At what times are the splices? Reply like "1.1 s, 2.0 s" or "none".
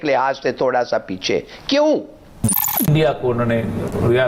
2.6 s